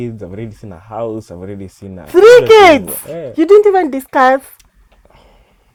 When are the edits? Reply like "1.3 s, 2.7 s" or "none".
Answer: none